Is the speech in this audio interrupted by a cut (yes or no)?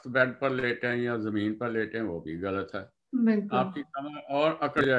no